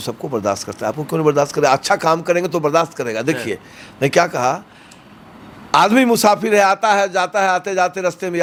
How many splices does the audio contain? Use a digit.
0